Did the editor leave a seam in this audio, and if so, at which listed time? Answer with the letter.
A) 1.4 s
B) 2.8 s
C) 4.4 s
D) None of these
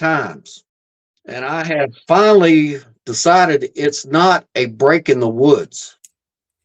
A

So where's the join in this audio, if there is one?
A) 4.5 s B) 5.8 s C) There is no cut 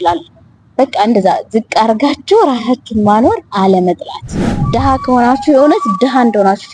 A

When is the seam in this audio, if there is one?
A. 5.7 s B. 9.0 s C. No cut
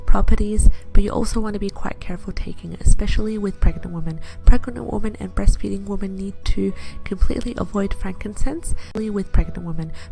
B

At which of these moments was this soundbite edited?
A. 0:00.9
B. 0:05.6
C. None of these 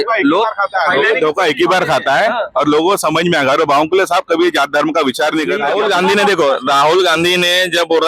B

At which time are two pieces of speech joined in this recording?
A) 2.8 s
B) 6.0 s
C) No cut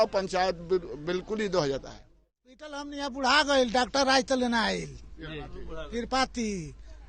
A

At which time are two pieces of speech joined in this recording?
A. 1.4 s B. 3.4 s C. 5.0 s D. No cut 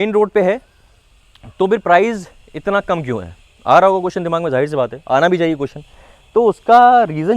D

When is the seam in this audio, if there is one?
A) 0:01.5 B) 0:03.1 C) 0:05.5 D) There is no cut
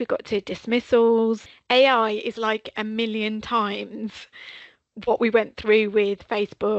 A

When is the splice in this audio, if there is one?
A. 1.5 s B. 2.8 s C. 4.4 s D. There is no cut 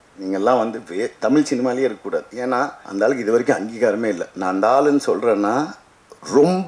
B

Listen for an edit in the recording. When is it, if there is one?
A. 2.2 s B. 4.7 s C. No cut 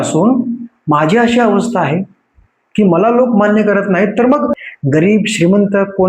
B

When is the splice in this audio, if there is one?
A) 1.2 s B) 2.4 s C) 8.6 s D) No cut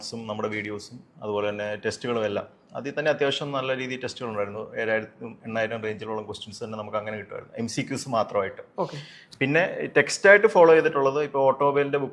D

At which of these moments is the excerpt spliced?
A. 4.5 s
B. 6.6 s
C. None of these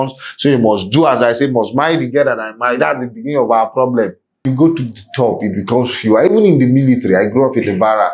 A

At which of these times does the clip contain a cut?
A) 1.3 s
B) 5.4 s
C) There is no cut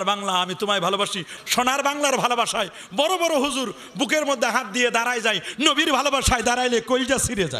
A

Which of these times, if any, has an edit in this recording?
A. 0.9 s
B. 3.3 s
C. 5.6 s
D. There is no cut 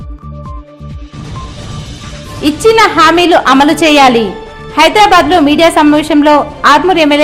A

